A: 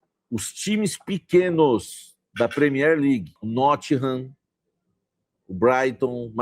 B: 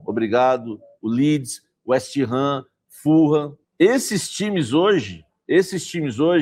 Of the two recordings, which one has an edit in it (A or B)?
A